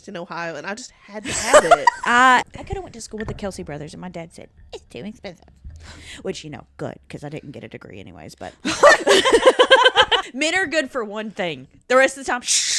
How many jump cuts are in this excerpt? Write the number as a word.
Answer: two